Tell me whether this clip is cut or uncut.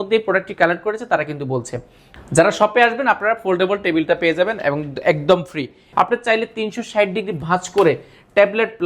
cut